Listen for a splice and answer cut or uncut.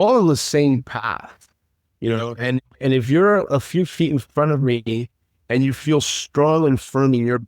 uncut